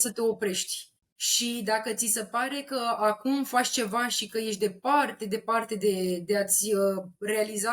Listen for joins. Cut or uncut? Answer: uncut